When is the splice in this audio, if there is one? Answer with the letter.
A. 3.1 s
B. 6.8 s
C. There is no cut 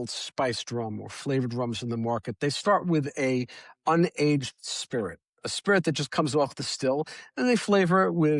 C